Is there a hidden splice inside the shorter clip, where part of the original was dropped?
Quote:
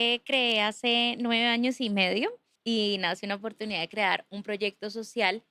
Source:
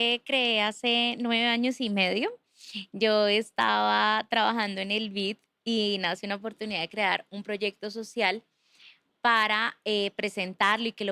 yes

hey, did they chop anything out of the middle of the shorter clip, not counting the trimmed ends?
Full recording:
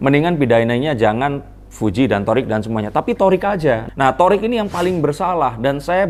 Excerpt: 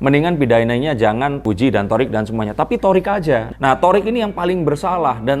yes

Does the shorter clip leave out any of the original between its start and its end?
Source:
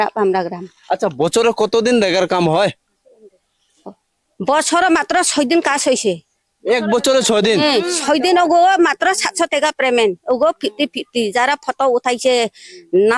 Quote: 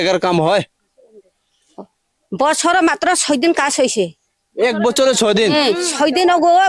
no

